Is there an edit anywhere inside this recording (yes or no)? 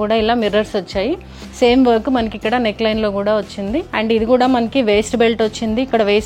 yes